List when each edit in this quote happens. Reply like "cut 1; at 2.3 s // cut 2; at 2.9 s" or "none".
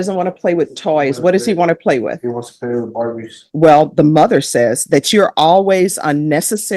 cut 1; at 3.4 s